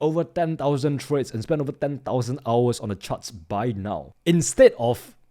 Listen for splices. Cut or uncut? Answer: cut